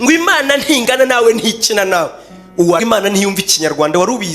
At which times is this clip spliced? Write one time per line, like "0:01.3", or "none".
0:02.8